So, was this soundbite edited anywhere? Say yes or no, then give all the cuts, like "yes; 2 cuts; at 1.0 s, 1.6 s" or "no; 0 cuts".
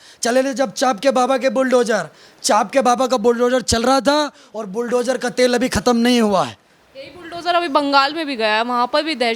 no; 0 cuts